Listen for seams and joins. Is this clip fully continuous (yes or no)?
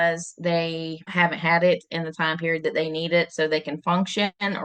no